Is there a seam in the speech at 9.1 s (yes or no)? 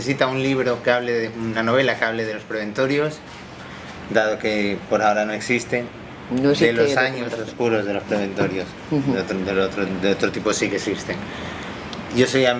no